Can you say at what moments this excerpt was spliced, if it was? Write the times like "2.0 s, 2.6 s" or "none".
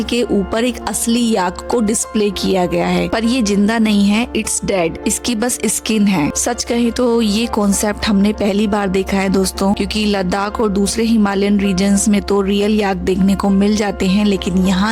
none